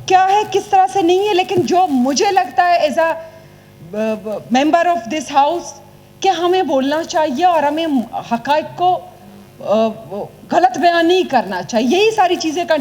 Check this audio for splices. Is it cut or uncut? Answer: uncut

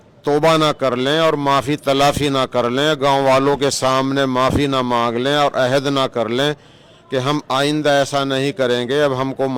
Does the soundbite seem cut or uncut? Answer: uncut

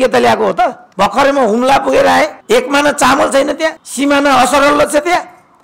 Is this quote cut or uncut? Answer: cut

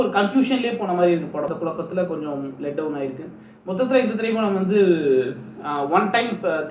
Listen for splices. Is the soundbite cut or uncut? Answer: cut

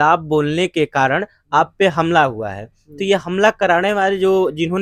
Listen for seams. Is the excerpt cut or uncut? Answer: uncut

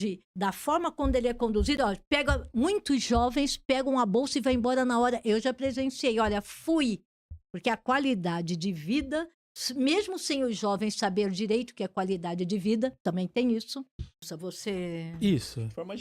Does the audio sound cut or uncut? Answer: cut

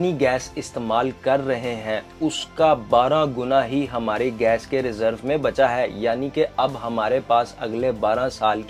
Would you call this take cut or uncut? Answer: uncut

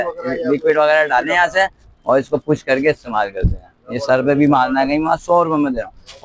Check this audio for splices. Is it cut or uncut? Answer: uncut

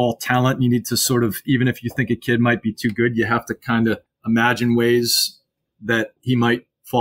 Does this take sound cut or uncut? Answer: cut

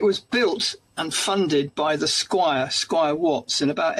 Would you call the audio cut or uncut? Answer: uncut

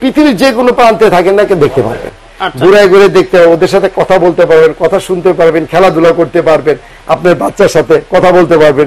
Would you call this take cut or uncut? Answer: uncut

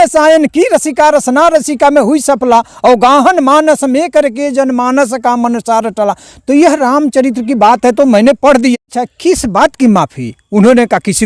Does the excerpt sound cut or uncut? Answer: cut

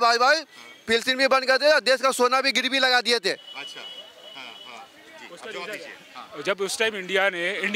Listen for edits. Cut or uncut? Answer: uncut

